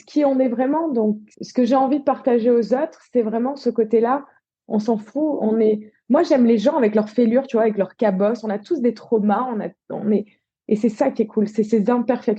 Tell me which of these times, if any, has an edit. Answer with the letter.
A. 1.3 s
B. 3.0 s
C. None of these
A